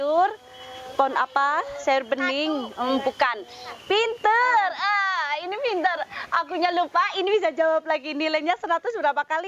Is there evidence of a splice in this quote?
yes; 1 cut; at 3.8 s

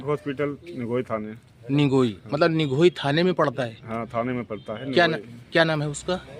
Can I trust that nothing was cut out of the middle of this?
no; 1 cut; at 1.3 s

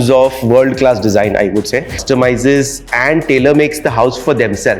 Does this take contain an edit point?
yes; 1 cut; at 2.0 s

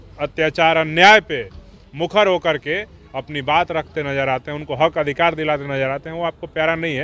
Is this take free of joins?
yes; 0 cuts

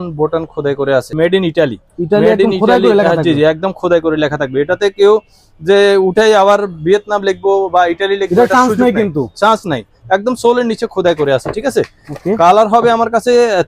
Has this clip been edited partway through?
no; 0 cuts

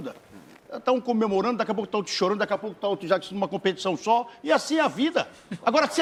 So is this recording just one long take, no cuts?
yes; 0 cuts

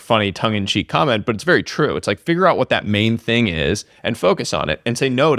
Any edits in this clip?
no; 0 cuts

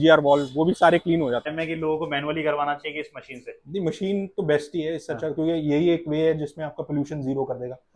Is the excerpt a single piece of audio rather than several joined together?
no; 1 cut; at 1.5 s

